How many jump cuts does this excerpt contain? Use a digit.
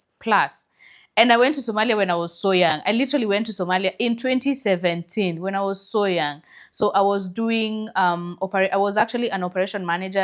0